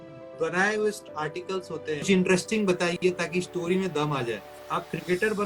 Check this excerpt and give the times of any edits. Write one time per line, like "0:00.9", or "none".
0:02.0
0:04.5